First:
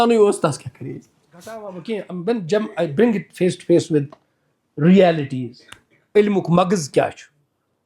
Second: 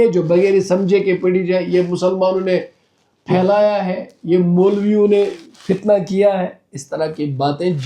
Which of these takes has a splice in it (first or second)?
first